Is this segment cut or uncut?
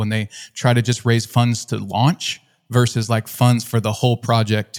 uncut